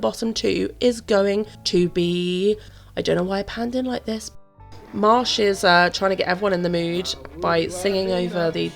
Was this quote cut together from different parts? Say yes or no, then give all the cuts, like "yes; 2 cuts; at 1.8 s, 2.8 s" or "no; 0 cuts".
yes; 3 cuts; at 1.6 s, 2.8 s, 4.2 s